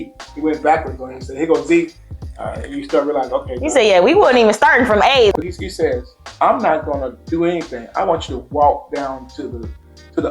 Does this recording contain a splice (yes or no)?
yes